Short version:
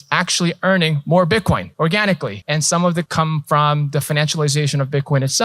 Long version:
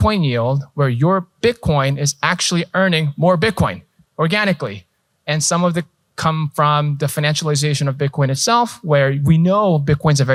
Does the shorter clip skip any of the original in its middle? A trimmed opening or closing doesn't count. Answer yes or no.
yes